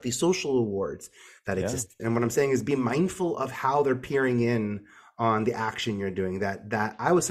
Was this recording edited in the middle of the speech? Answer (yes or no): yes